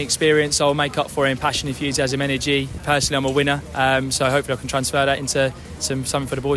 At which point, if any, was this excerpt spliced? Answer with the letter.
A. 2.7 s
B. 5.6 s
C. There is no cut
A